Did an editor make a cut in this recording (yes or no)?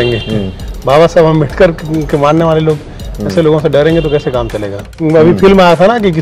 yes